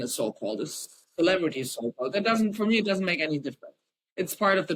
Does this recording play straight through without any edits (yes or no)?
yes